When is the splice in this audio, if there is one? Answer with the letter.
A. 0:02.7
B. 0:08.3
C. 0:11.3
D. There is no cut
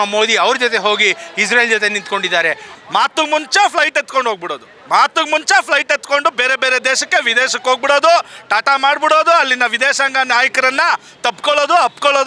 A